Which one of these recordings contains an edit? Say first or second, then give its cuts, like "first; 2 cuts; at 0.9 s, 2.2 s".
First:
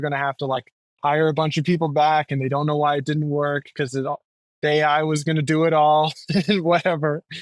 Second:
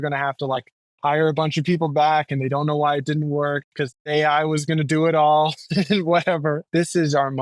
second; 2 cuts; at 4.0 s, 6.6 s